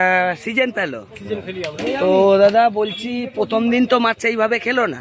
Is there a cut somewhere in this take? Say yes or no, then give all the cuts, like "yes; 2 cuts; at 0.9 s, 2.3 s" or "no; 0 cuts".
no; 0 cuts